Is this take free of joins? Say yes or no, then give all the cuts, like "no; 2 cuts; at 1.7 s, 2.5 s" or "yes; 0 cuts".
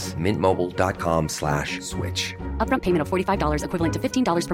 yes; 0 cuts